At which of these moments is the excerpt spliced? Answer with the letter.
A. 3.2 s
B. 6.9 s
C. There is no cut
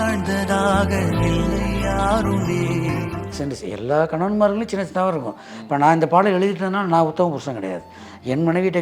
A